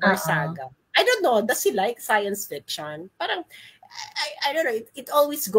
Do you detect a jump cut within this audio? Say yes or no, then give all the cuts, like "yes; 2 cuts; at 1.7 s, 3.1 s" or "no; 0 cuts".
no; 0 cuts